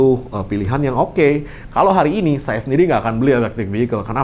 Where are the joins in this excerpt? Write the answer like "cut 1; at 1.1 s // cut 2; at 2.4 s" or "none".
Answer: none

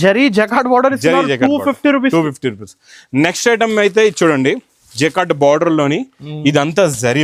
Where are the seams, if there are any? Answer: none

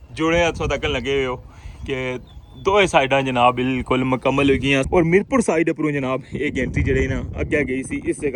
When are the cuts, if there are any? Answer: cut 1; at 4.9 s

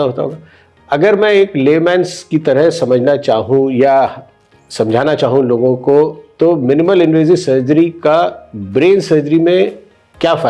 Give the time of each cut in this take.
none

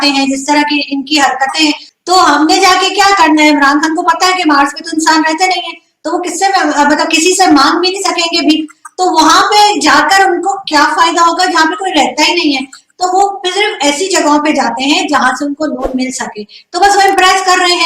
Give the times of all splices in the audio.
cut 1; at 1.9 s

